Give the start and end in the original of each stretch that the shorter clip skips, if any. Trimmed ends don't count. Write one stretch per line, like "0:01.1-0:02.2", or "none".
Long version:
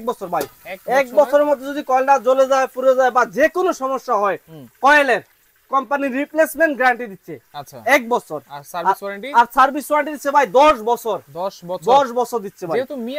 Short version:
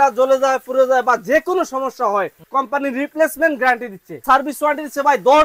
0:04.5-0:05.6
0:07.4-0:09.5